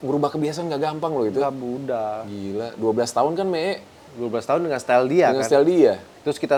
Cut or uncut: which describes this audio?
uncut